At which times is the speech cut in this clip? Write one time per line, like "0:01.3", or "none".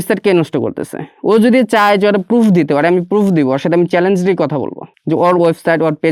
none